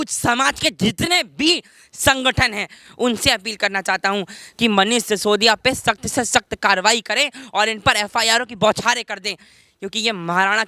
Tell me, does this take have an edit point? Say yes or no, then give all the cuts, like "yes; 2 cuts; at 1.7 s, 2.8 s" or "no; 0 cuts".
no; 0 cuts